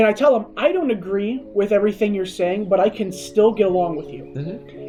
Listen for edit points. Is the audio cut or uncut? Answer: uncut